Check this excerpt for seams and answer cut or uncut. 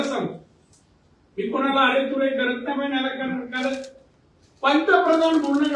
uncut